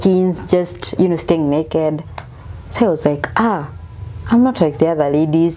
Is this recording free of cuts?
yes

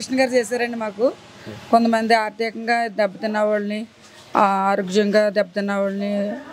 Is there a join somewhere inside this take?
no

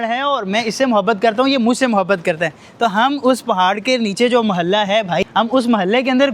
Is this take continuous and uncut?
no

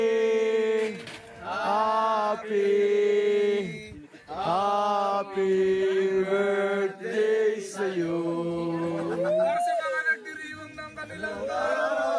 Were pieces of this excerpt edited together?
no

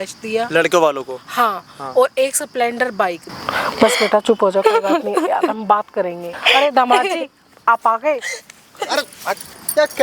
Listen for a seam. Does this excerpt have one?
yes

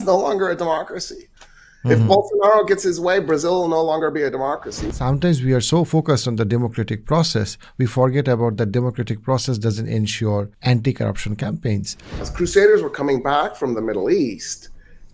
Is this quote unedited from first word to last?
no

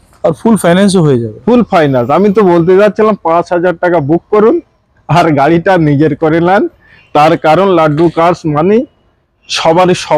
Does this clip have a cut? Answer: no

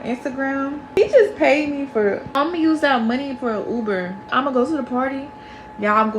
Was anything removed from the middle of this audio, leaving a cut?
yes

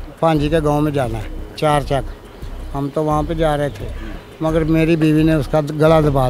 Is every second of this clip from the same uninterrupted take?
yes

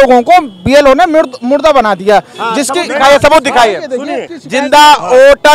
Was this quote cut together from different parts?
yes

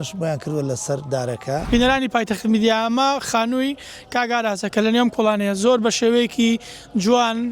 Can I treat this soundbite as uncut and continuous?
no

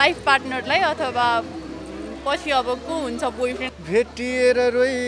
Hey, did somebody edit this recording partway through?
yes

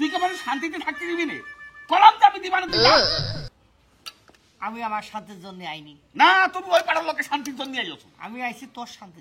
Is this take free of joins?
yes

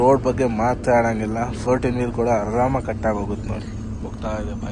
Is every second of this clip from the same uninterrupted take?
yes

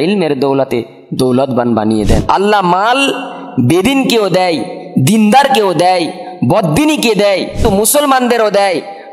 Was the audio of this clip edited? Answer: yes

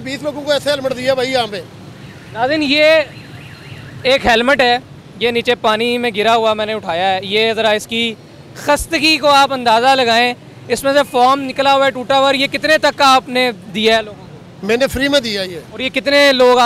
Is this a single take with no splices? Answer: yes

